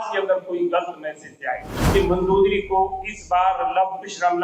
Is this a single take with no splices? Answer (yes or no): no